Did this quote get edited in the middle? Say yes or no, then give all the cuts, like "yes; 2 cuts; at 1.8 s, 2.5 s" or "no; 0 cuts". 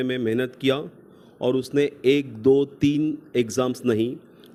no; 0 cuts